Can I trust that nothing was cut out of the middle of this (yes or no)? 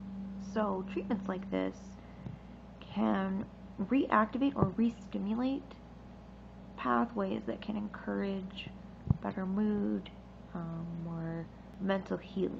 no